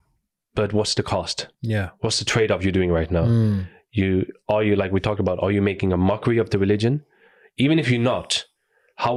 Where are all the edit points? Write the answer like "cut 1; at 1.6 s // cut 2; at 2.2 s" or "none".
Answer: none